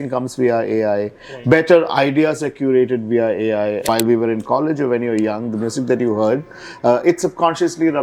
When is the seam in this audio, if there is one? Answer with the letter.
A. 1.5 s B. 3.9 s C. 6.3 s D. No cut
B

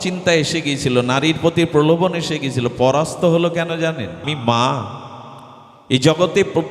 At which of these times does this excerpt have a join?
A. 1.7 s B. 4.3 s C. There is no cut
B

